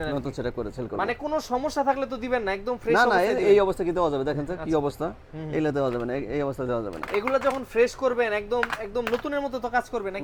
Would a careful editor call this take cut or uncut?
uncut